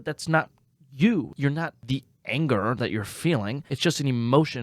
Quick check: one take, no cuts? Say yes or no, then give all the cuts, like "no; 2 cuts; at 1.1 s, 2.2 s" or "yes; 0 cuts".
no; 2 cuts; at 1.4 s, 3.6 s